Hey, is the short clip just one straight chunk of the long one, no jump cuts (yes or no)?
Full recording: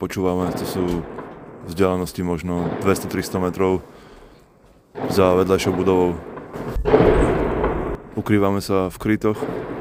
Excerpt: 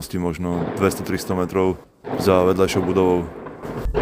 no